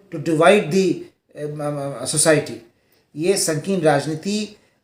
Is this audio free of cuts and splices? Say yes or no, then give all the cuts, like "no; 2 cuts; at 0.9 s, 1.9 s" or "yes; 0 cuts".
yes; 0 cuts